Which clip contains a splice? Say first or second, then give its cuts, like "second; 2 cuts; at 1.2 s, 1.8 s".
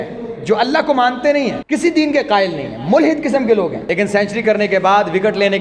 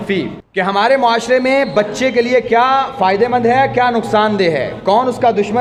first; 2 cuts; at 1.6 s, 3.8 s